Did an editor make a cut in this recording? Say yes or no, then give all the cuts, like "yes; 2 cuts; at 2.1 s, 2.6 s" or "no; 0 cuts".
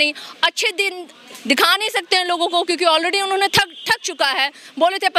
no; 0 cuts